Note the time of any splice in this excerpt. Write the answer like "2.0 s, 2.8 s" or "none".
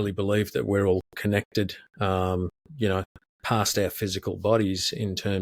none